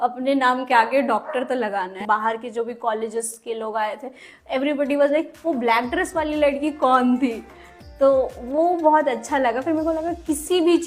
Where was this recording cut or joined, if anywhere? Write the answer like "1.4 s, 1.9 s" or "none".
2.0 s